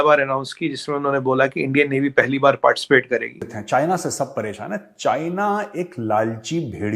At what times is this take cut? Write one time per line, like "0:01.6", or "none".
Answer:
0:03.5